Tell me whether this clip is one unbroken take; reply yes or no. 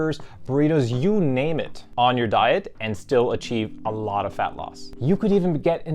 no